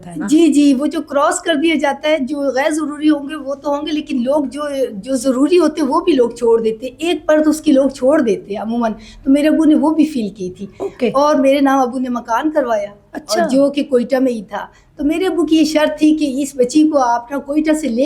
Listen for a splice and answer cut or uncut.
uncut